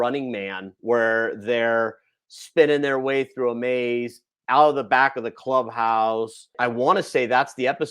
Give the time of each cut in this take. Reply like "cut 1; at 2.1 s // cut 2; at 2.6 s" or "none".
cut 1; at 6.5 s

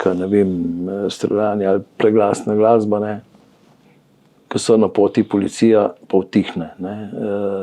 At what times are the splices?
none

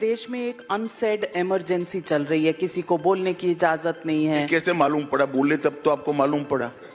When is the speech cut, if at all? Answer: none

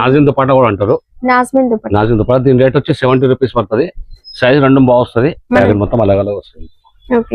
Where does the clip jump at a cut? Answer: cut 1; at 5.6 s

